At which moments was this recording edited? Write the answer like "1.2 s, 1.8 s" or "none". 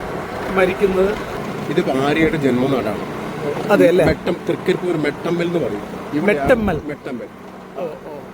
1.3 s